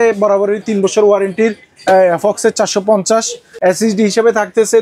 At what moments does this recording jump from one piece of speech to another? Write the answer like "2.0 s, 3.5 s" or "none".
3.4 s